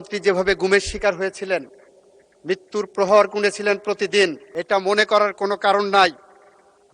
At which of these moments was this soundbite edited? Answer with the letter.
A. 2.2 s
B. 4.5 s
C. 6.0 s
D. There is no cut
B